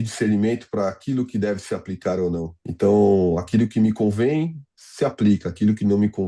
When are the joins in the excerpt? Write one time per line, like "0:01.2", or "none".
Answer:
0:02.6